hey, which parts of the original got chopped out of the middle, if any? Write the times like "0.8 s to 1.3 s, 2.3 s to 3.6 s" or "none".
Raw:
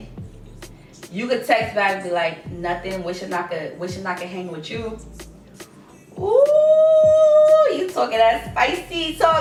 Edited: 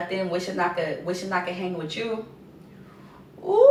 none